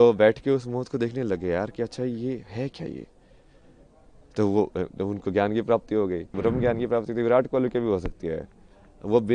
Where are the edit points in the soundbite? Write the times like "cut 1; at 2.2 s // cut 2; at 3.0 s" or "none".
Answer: cut 1; at 6.3 s